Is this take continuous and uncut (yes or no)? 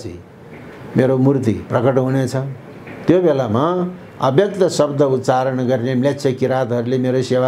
yes